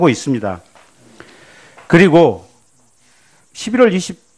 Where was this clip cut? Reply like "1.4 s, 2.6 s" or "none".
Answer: 1.3 s